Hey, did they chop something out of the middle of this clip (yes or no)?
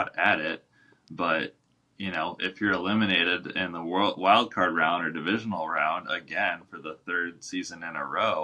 no